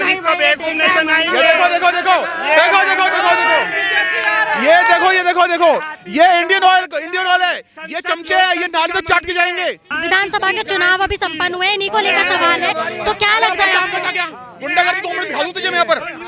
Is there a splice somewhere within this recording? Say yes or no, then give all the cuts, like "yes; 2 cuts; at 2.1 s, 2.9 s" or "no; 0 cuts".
no; 0 cuts